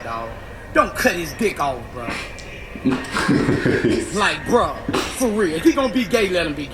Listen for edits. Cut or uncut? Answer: uncut